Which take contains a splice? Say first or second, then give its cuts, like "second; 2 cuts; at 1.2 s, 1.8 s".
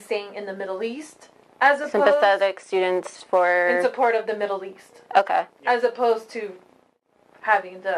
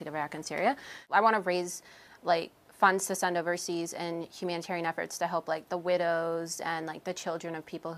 second; 1 cut; at 1.0 s